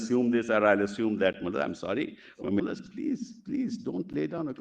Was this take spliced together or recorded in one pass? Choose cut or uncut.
cut